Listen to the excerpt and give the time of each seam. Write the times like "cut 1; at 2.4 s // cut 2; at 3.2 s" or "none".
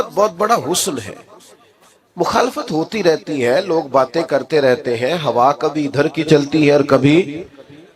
none